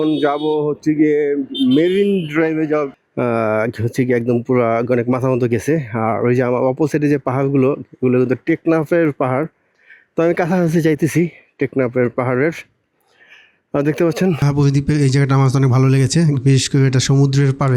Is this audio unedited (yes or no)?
no